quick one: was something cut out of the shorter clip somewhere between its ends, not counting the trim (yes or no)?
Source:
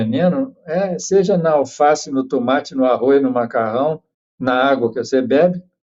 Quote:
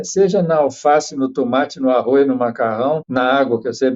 yes